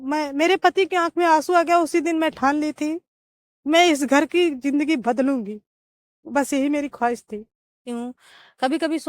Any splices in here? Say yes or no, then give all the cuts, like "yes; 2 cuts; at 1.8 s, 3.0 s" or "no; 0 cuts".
yes; 1 cut; at 7.8 s